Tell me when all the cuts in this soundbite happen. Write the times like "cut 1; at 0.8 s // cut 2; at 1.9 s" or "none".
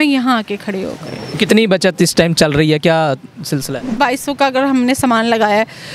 cut 1; at 1.2 s // cut 2; at 4.0 s